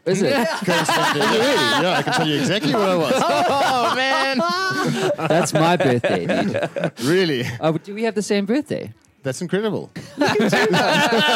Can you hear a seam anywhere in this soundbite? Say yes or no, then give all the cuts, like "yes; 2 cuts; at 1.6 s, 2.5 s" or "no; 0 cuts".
yes; 1 cut; at 10.0 s